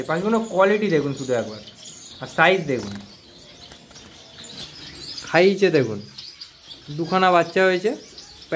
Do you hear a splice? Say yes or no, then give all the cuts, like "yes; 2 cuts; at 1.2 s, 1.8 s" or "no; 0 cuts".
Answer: yes; 1 cut; at 4.6 s